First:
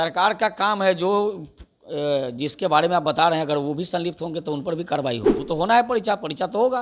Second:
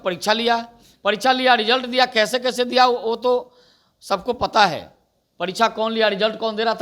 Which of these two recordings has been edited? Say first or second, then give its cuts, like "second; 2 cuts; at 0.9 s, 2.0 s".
first; 1 cut; at 5.3 s